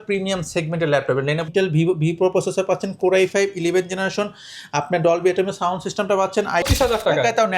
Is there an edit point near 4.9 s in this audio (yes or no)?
no